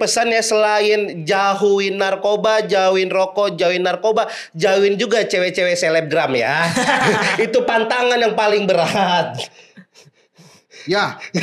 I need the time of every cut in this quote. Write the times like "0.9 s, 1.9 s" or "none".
none